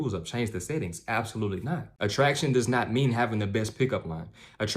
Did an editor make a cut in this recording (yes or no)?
yes